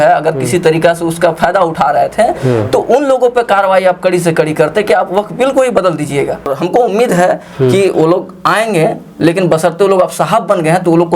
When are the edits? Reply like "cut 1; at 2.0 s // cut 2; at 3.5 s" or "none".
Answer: cut 1; at 6.5 s